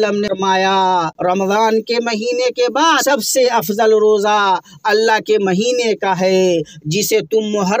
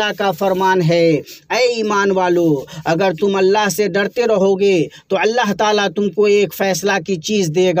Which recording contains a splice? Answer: first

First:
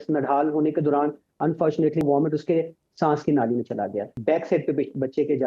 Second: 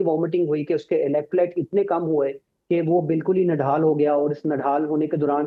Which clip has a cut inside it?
first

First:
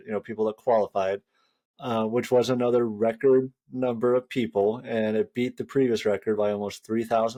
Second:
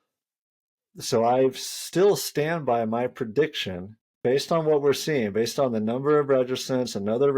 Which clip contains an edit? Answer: second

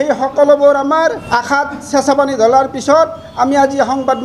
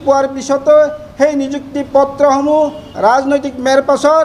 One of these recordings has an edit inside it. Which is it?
first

